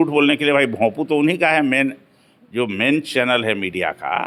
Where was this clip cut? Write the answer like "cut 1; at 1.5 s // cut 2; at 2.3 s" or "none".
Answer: none